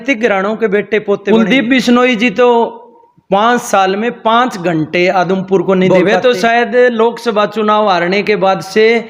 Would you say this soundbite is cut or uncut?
cut